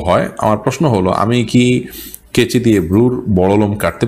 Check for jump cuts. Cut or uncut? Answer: uncut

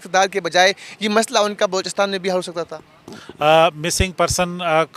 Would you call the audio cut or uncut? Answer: uncut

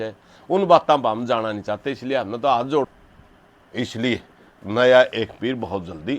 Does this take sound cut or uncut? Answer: cut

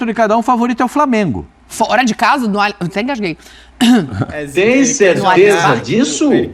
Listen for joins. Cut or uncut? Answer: uncut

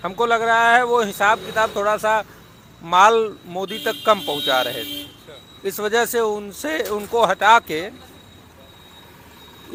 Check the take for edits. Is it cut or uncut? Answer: uncut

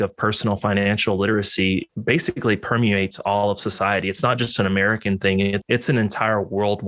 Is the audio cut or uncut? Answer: cut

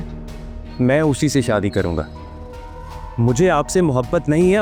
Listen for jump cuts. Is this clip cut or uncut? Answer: uncut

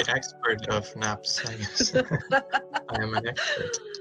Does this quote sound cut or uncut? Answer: uncut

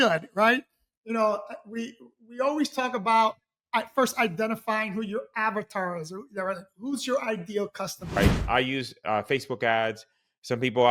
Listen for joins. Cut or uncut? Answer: cut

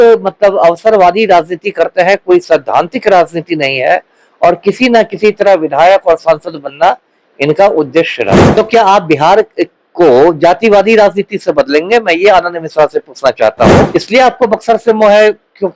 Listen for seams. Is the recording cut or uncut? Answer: cut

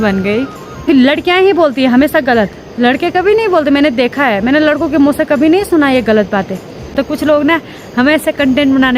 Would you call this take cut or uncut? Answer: cut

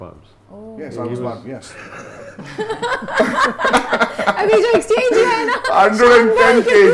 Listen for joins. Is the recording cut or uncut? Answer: uncut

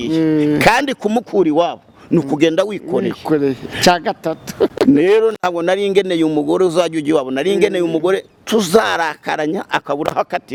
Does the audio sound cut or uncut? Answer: uncut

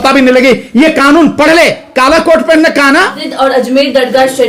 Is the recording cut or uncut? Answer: cut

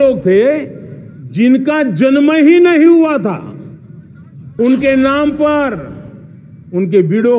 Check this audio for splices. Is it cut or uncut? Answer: cut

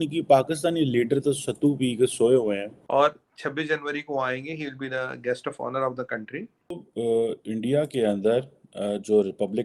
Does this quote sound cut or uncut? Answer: cut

